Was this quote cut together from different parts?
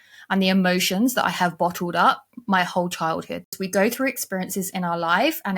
yes; 1 cut; at 3.5 s

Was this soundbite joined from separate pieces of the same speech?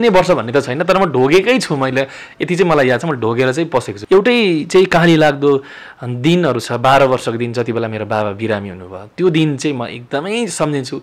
yes; 1 cut; at 3.9 s

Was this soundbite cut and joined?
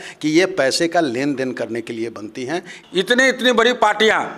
yes; 1 cut; at 2.8 s

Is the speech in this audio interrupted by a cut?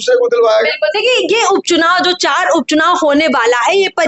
no; 0 cuts

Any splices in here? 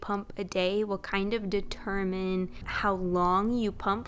yes; 1 cut; at 2.6 s

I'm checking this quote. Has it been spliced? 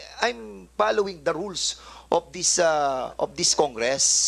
no; 0 cuts

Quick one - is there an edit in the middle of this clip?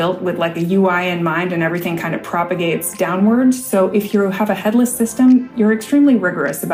no; 0 cuts

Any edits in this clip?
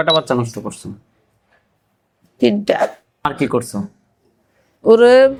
no; 0 cuts

